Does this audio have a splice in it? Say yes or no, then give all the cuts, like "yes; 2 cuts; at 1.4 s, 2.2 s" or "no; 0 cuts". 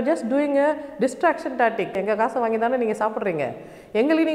yes; 1 cut; at 2.0 s